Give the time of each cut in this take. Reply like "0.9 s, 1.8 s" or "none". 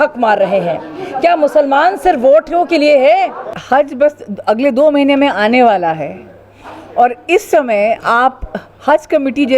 3.6 s